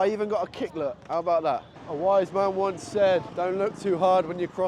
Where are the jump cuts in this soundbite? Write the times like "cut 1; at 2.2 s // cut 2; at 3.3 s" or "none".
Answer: cut 1; at 1.8 s // cut 2; at 3.3 s